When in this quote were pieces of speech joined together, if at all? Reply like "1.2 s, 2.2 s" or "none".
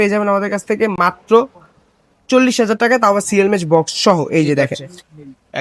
none